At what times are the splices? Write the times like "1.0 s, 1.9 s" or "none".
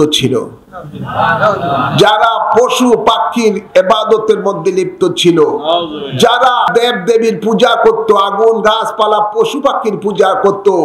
6.7 s